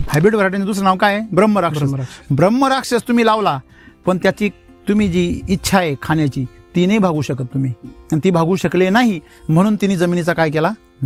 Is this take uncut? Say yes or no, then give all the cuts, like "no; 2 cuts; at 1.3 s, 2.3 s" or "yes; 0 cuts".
yes; 0 cuts